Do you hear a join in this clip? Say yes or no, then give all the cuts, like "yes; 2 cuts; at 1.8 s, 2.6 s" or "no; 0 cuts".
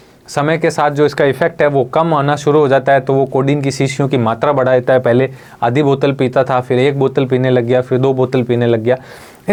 no; 0 cuts